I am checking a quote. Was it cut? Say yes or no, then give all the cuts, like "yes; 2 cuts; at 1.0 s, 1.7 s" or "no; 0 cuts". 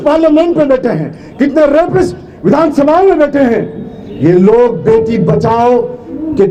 no; 0 cuts